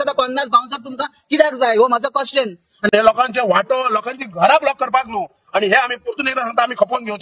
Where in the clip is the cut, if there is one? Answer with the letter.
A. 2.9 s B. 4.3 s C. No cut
A